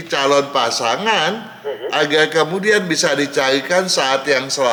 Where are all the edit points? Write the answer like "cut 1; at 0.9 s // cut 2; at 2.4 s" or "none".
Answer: none